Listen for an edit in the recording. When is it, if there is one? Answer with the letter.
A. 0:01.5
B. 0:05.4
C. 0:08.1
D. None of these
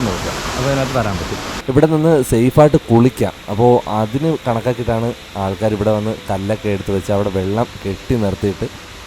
A